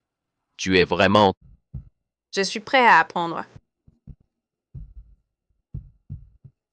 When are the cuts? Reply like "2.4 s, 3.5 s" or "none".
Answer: 1.4 s